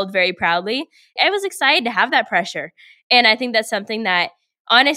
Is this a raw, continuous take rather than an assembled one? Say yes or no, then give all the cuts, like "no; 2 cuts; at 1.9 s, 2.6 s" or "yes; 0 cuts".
no; 1 cut; at 1.1 s